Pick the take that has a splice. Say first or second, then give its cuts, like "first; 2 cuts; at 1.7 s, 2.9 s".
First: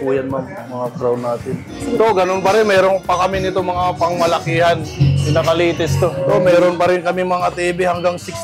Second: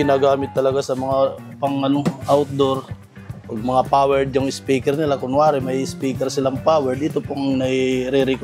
first; 3 cuts; at 1.7 s, 4.9 s, 6.2 s